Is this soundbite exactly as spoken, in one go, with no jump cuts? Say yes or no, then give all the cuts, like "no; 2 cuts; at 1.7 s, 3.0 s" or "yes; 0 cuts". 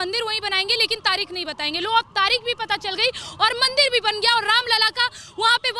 yes; 0 cuts